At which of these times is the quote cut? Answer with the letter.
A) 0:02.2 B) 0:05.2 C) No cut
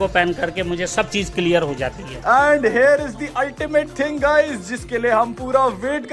A